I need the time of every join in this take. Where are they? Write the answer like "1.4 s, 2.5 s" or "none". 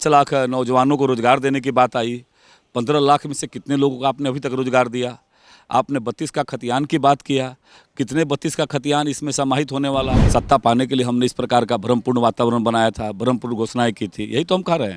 10.2 s